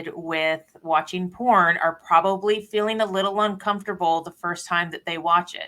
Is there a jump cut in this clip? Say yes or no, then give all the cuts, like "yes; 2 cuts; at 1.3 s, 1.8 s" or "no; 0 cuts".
no; 0 cuts